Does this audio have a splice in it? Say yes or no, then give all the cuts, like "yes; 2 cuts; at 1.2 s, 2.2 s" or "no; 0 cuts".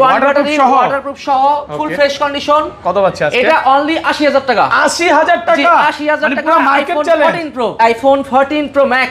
yes; 1 cut; at 7.7 s